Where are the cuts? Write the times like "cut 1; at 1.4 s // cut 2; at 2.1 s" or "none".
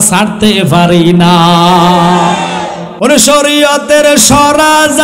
cut 1; at 2.8 s